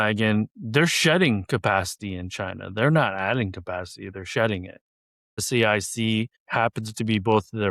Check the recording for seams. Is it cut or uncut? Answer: cut